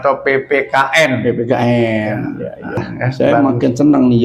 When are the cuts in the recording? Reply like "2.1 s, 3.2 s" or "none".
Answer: 2.9 s